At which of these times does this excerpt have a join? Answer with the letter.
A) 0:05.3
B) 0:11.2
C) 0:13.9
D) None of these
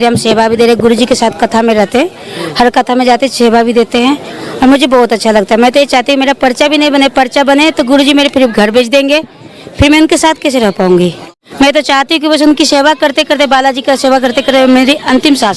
B